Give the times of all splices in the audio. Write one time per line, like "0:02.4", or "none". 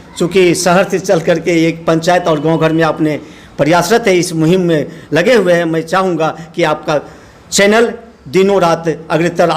none